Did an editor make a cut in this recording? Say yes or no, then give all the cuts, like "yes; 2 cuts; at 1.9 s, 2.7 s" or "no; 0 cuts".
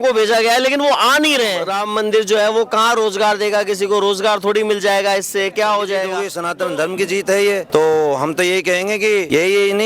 yes; 2 cuts; at 1.7 s, 6.3 s